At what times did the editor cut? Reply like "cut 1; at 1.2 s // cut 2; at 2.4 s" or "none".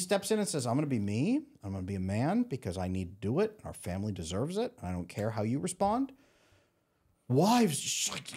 none